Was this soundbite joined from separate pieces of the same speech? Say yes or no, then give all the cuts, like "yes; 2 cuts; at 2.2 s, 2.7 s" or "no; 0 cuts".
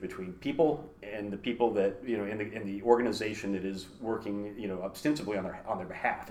no; 0 cuts